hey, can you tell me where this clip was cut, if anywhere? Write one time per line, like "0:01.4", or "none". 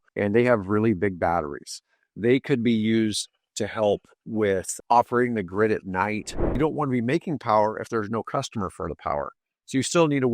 0:06.4

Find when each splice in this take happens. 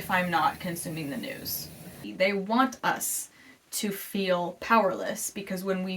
0:02.0

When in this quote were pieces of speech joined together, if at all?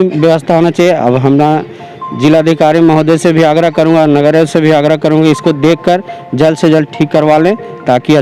none

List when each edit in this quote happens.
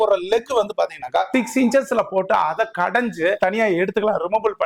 0:01.3
0:03.4

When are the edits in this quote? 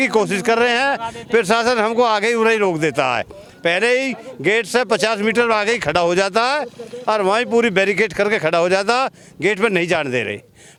none

